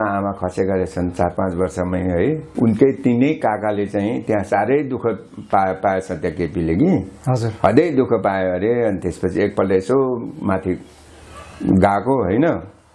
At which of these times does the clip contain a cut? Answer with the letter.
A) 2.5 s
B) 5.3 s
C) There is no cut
A